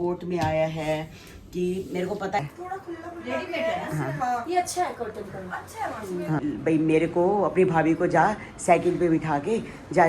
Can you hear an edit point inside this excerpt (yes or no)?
yes